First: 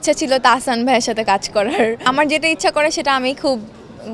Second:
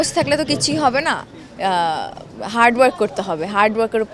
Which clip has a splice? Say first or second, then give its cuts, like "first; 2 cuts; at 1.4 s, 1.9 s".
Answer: first; 1 cut; at 2.0 s